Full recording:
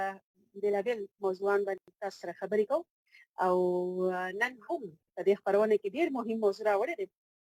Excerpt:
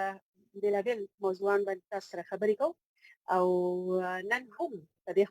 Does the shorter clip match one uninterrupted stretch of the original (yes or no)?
no